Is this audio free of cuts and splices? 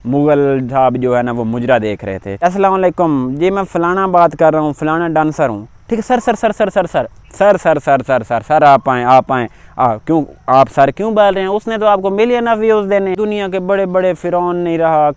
no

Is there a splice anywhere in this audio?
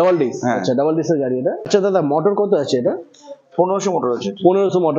yes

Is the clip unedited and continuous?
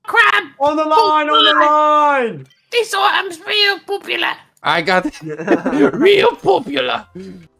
yes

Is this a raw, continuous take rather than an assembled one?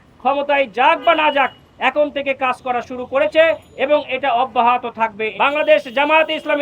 no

